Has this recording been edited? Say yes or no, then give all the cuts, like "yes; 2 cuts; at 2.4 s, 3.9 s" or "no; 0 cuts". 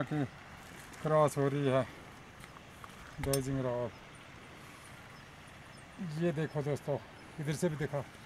no; 0 cuts